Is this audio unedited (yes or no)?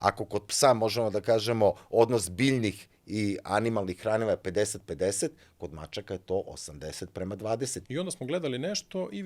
no